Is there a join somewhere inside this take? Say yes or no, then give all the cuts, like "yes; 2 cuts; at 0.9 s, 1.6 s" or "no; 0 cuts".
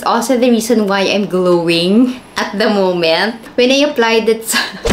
yes; 1 cut; at 3.4 s